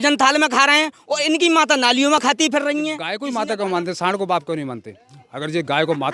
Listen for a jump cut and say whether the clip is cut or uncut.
cut